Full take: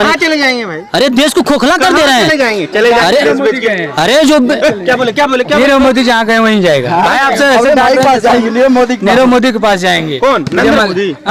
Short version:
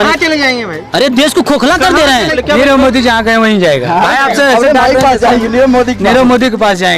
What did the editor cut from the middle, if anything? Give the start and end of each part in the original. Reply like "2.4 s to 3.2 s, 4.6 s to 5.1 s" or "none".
2.3 s to 5.3 s